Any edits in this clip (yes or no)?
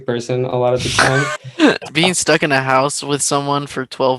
yes